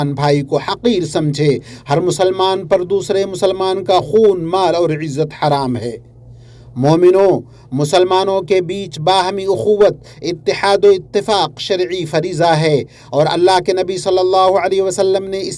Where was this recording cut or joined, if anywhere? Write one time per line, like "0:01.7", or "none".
none